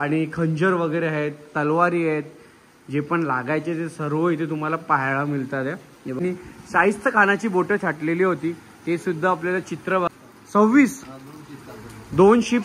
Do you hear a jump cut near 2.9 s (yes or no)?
no